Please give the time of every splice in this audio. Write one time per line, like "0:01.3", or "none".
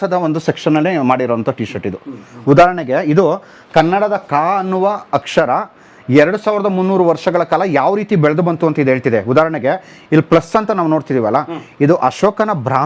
none